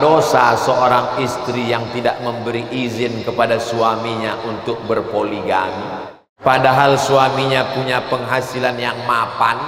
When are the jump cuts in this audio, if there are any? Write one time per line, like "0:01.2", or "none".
0:06.3